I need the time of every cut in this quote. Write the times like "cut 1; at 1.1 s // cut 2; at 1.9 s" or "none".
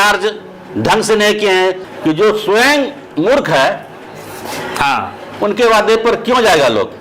cut 1; at 1.8 s